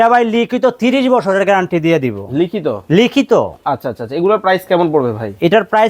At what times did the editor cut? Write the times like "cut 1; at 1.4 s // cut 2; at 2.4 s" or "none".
none